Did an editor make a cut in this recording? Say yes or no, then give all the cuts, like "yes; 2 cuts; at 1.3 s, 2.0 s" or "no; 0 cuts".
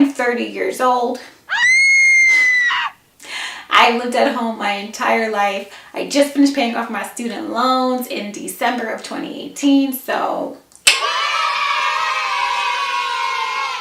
no; 0 cuts